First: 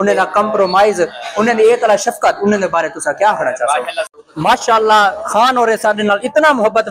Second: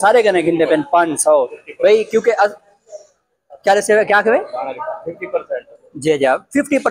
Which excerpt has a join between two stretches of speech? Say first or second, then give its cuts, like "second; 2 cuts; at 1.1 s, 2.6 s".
first; 1 cut; at 4.0 s